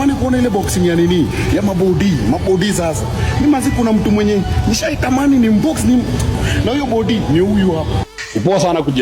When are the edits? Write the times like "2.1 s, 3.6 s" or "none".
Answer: none